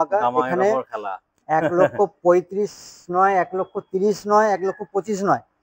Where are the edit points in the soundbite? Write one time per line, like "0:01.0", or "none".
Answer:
none